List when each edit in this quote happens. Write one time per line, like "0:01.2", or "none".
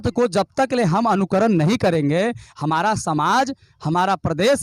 none

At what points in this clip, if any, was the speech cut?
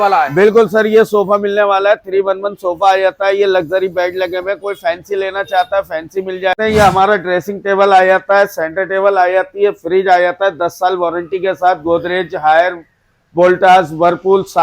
0:06.5

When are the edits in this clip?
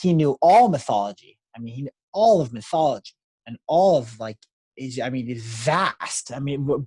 none

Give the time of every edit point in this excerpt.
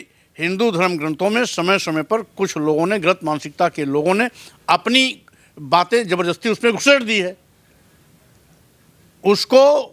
none

